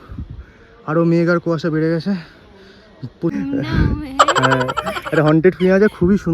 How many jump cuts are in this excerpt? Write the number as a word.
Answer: one